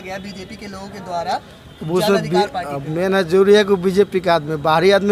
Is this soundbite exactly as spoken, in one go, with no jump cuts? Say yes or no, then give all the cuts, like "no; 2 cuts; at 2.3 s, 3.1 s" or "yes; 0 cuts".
yes; 0 cuts